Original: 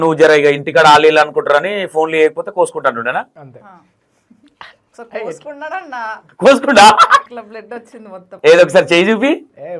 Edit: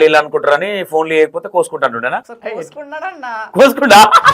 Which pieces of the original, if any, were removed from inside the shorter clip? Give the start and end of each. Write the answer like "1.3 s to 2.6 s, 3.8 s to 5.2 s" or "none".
3.3 s to 5.0 s, 6.2 s to 6.3 s